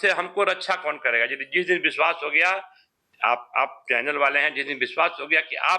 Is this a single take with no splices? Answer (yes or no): yes